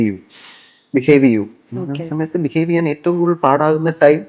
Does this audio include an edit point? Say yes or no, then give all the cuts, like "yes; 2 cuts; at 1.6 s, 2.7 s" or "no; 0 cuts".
no; 0 cuts